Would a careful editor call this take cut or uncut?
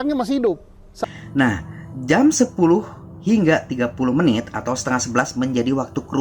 cut